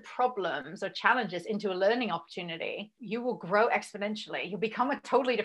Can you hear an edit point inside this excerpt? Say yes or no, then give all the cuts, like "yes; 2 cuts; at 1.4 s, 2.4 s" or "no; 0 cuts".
yes; 1 cut; at 3.0 s